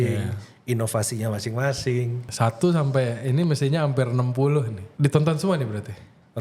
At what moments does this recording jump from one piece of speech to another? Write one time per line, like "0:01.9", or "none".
0:02.3
0:04.8

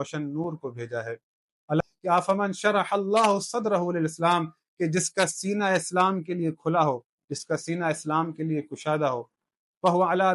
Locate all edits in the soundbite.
0:01.8

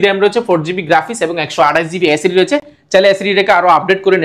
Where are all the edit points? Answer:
none

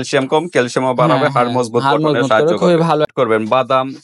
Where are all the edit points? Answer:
0:03.1

